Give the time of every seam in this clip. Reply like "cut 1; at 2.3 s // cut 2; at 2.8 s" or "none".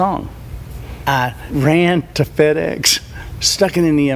cut 1; at 1.0 s // cut 2; at 2.1 s